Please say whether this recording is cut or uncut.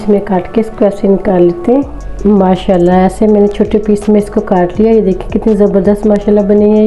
cut